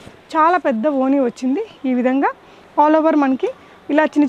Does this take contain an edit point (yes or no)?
no